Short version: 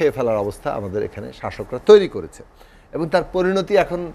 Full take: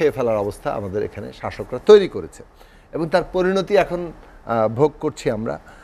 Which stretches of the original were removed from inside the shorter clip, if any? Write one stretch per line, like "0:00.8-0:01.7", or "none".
none